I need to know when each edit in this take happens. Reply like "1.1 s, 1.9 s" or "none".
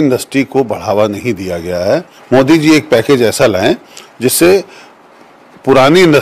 2.1 s